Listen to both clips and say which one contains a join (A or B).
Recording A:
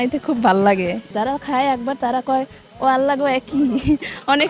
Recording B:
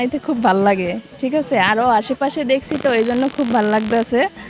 A